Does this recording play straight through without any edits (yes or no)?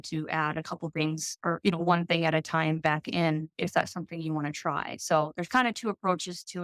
yes